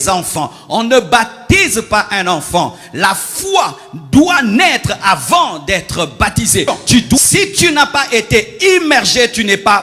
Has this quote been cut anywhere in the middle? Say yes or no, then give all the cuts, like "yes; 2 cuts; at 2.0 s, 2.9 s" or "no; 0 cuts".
yes; 1 cut; at 7.2 s